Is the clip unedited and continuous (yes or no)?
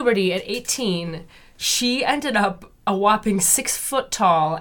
yes